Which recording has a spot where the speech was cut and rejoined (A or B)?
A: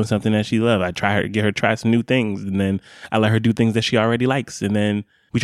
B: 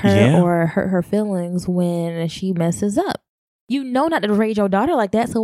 B